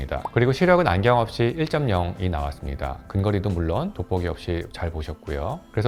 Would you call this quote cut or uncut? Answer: uncut